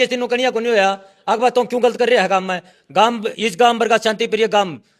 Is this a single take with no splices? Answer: yes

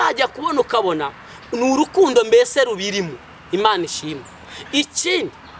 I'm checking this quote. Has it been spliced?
no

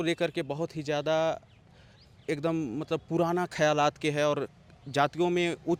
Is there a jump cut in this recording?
no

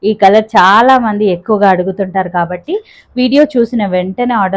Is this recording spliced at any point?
no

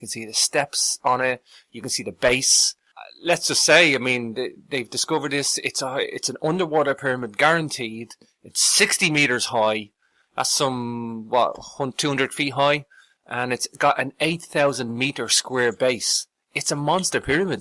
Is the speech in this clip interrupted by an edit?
no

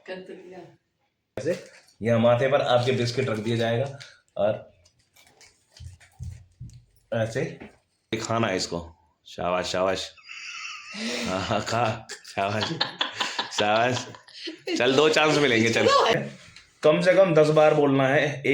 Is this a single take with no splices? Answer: no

